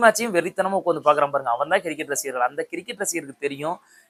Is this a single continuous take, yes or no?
yes